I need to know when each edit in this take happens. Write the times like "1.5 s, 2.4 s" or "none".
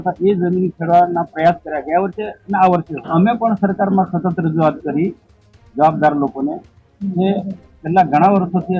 3.1 s